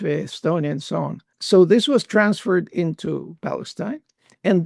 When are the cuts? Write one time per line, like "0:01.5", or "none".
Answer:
0:01.3